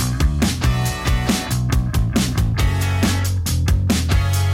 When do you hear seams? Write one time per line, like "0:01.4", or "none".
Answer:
0:01.5